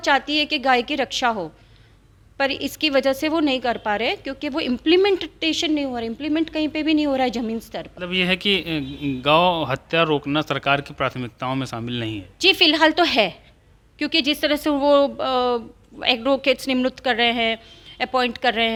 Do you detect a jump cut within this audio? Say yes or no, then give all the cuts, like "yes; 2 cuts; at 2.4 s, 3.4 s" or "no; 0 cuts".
no; 0 cuts